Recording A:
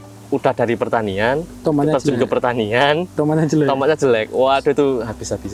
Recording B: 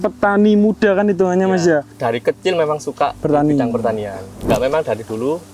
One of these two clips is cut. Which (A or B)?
B